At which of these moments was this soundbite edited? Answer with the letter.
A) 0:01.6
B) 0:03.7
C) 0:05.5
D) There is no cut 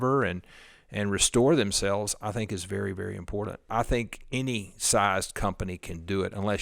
B